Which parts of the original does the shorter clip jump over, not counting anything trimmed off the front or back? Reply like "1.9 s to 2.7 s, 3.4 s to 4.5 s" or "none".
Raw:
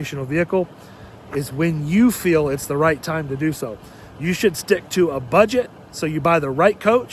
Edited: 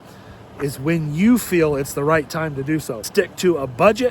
3.8 s to 4.6 s